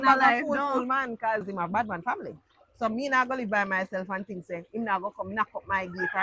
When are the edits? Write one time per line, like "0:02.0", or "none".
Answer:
0:01.5